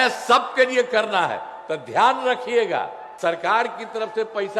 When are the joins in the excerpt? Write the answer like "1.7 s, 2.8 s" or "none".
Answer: 3.0 s